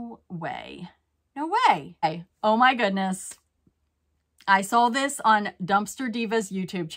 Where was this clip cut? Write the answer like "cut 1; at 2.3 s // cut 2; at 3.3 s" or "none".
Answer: cut 1; at 2.0 s